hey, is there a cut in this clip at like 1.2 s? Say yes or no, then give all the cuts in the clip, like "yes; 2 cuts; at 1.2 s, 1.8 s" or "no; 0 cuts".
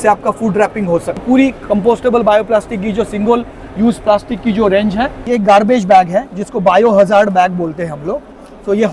yes; 2 cuts; at 1.2 s, 5.2 s